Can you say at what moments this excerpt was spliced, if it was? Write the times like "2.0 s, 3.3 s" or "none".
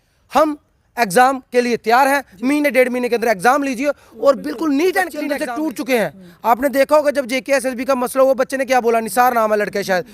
5.3 s